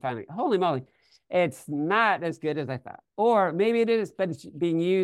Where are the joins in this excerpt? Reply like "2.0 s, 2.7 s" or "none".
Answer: none